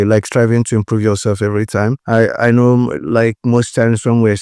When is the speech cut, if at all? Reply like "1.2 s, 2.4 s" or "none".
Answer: 2.0 s